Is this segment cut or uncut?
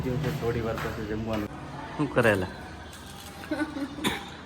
cut